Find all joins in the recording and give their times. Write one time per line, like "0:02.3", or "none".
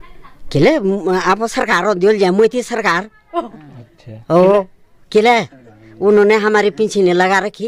none